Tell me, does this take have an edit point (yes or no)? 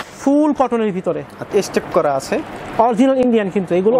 yes